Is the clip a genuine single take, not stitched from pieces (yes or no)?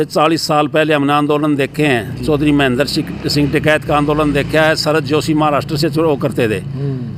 yes